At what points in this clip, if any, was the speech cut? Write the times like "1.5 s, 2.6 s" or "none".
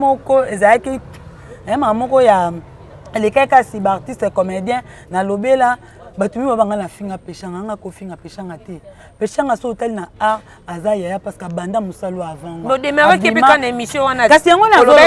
none